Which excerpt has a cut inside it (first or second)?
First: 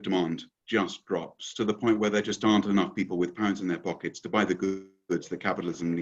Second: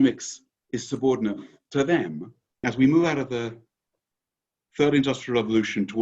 second